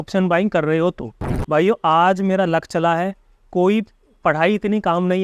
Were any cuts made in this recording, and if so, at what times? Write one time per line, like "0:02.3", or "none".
0:01.3